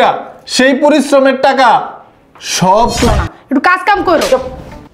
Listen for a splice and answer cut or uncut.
cut